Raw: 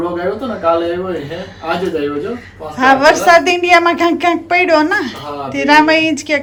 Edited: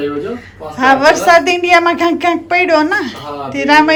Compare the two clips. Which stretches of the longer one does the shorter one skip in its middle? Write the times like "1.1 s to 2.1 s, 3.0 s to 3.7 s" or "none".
none